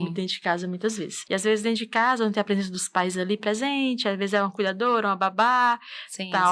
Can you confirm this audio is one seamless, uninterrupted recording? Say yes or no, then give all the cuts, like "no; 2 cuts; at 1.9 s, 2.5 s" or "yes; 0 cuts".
no; 1 cut; at 1.1 s